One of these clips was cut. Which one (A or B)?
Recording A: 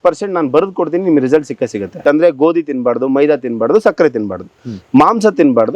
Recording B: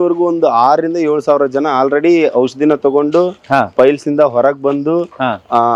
A